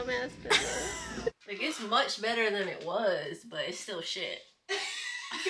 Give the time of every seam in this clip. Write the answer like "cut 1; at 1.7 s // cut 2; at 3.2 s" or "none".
cut 1; at 1.3 s